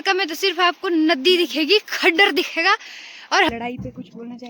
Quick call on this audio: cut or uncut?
cut